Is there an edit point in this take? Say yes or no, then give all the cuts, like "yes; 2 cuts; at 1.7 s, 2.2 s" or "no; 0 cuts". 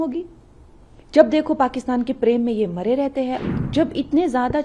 yes; 1 cut; at 3.5 s